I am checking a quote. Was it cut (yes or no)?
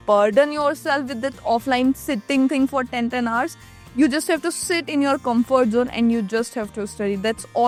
no